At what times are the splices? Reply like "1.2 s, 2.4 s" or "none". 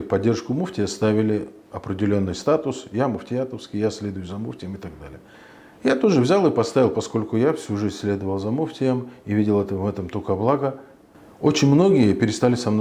none